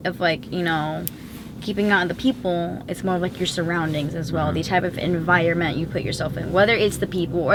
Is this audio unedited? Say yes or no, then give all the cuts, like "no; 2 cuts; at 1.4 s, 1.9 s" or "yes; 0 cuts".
yes; 0 cuts